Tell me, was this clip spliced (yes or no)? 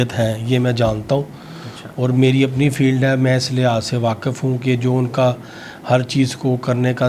no